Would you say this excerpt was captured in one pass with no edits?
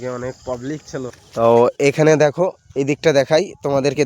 no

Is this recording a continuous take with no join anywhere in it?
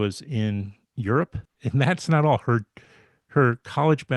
no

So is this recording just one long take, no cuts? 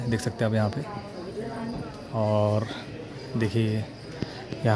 yes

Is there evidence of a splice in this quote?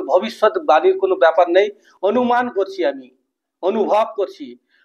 no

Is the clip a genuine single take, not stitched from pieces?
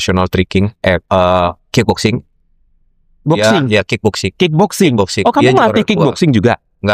yes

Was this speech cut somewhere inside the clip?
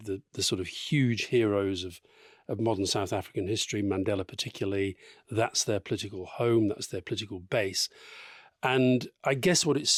no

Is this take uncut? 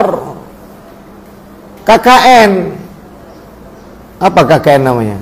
yes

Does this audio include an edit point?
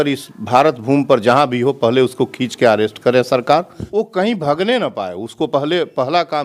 yes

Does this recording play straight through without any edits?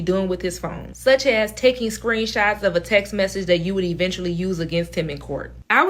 yes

